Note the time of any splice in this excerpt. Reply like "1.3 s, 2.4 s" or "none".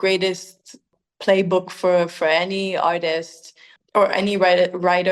0.9 s